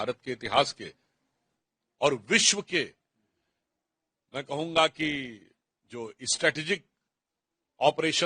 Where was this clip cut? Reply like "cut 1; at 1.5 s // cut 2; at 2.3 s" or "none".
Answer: none